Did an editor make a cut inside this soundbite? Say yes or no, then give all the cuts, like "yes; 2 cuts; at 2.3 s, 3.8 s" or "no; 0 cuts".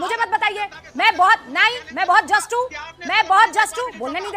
no; 0 cuts